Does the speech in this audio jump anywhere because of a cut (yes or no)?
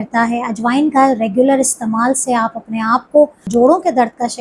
yes